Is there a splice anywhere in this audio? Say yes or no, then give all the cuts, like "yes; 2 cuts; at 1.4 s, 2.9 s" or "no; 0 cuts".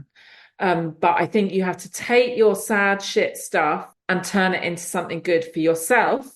yes; 1 cut; at 3.9 s